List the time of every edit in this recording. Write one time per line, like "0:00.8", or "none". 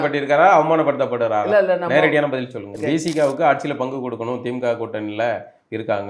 0:02.7